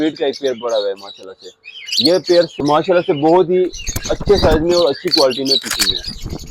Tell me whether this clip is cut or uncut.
cut